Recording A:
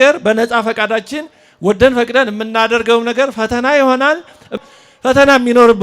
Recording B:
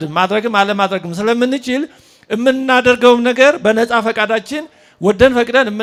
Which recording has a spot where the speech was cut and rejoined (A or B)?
A